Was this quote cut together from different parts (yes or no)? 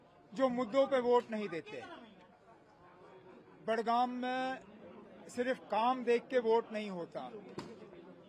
no